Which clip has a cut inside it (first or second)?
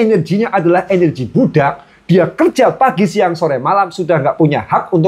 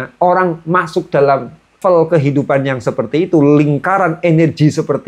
second